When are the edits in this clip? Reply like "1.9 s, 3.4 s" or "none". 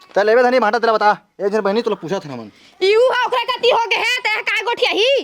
none